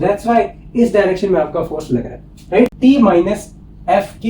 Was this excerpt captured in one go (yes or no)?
no